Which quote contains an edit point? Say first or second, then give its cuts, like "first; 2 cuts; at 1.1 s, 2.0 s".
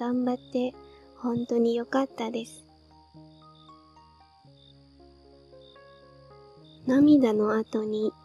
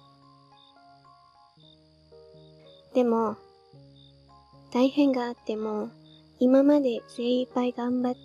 first; 3 cuts; at 2.9 s, 5.0 s, 6.8 s